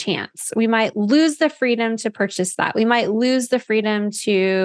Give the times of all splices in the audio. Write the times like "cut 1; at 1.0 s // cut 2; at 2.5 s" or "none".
none